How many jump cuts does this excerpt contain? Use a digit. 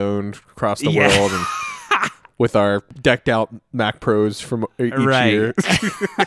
1